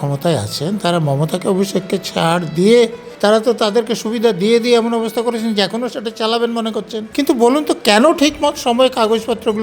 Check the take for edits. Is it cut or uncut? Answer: cut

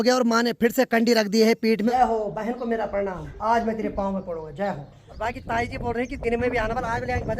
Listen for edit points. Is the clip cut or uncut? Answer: cut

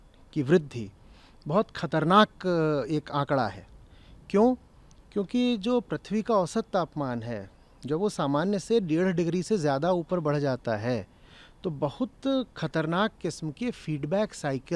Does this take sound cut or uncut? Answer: uncut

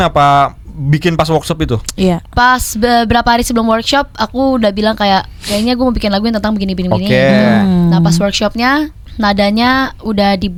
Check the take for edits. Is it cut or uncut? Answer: uncut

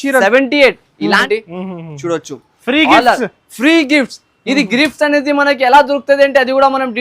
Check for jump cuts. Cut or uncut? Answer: cut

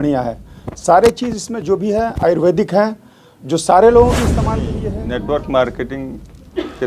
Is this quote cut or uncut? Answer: cut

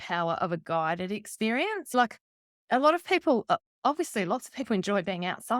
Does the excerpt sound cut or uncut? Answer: uncut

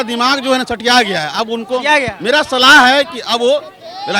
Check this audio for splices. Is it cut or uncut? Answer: uncut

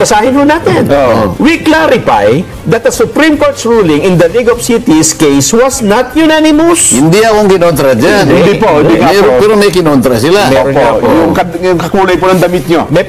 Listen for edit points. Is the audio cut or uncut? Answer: uncut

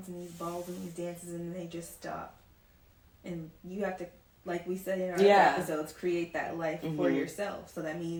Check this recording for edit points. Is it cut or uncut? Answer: uncut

